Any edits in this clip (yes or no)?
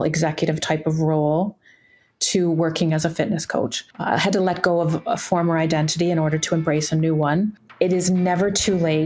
yes